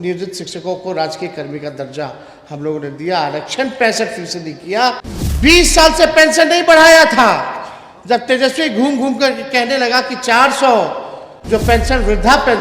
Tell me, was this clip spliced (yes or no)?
yes